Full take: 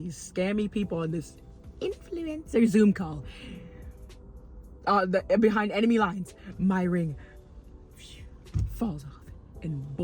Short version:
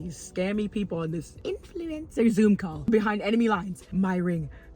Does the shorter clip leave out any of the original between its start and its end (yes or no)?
yes